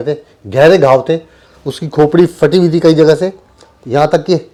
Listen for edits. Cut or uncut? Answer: uncut